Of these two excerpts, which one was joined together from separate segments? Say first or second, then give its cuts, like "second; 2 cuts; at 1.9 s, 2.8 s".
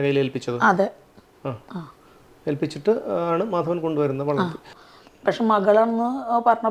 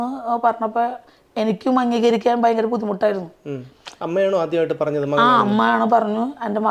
first; 1 cut; at 4.7 s